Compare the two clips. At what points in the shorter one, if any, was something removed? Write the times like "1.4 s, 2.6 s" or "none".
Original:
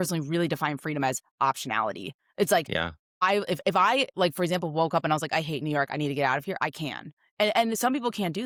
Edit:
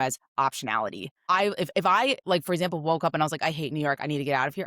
1.1 s

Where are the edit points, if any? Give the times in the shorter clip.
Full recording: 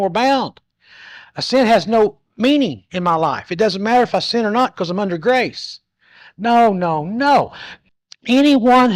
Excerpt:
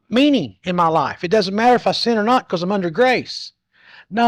none

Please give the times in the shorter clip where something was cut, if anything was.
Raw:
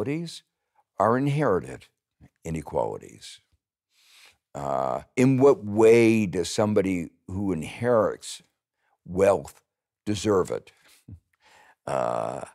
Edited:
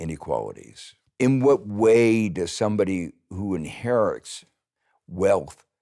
1.1 s

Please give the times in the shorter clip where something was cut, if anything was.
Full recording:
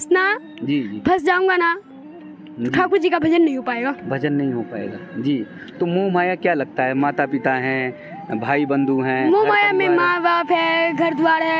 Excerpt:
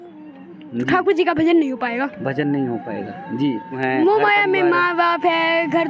3.8 s

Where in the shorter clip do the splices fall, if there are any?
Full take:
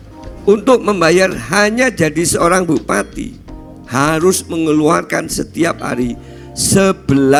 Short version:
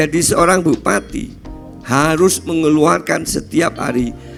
none

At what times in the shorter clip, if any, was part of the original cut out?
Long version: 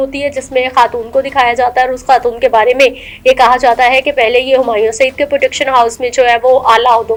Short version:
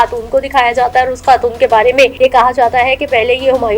2.1 s

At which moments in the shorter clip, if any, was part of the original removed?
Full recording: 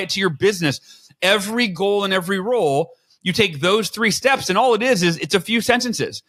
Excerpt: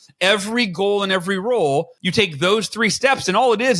2.0 s

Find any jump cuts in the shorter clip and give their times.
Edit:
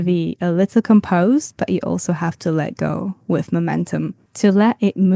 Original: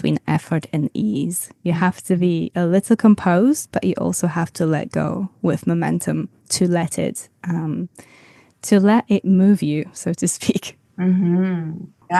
4.2 s

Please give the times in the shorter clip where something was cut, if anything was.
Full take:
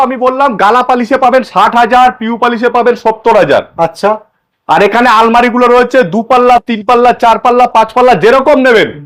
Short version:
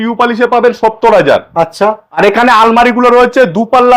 2.2 s

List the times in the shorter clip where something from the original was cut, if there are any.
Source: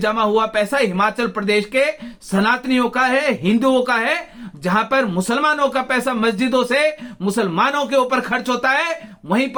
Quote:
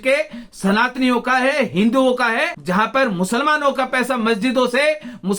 2.5 s

